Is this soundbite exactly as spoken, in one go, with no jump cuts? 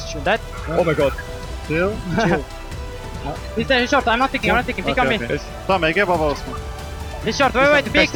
yes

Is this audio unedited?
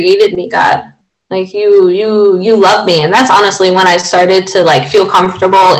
no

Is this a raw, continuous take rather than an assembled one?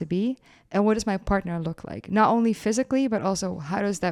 yes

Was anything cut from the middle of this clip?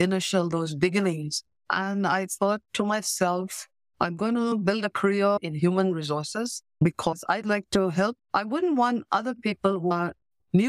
yes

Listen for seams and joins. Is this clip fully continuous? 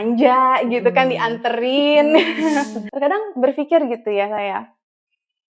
no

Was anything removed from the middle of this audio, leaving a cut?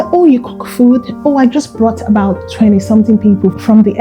no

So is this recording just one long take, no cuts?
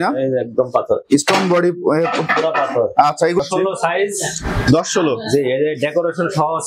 no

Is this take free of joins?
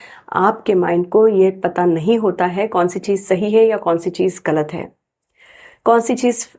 yes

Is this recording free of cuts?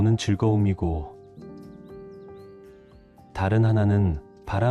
no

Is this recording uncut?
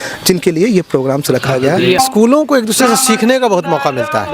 no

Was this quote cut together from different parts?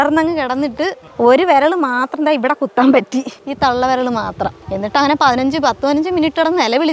yes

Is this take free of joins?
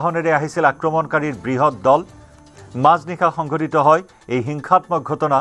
yes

